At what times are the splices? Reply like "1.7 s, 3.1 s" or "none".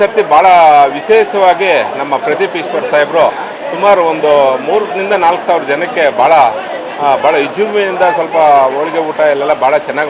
none